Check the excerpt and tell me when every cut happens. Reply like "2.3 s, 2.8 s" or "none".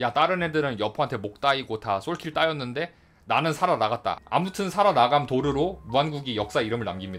4.1 s